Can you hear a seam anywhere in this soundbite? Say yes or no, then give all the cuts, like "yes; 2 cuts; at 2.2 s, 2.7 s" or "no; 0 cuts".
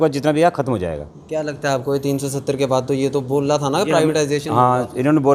no; 0 cuts